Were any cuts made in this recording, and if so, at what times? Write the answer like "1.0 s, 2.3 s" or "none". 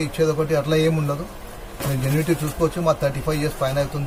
none